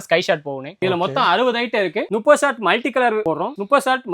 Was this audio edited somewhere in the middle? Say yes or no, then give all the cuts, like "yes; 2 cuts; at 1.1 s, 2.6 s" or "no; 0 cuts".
yes; 2 cuts; at 0.8 s, 2.1 s